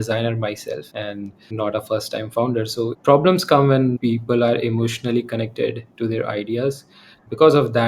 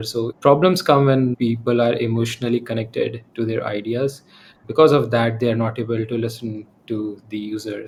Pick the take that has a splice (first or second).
first